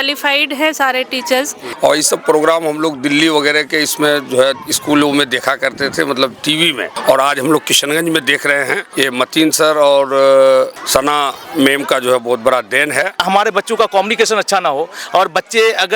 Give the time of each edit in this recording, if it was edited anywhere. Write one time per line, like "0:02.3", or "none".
0:01.6
0:06.9
0:08.8
0:10.8
0:13.2

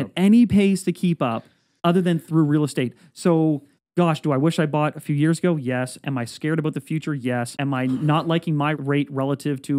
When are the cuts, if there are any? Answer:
0:07.5
0:08.8

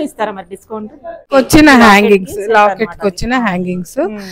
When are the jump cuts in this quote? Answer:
0:01.3

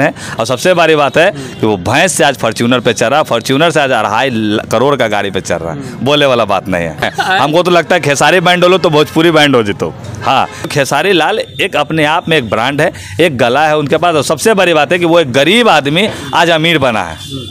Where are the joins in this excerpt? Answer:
0:07.1
0:10.7

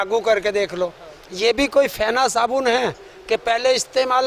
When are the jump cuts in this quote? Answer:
none

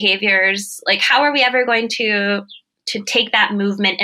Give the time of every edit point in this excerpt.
none

